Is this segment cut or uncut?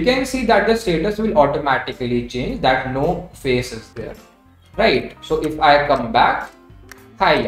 uncut